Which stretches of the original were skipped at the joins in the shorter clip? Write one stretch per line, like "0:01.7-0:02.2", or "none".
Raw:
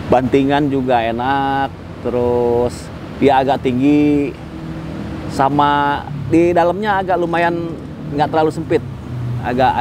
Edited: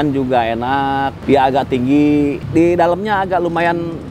0:01.7-0:03.1
0:04.4-0:06.2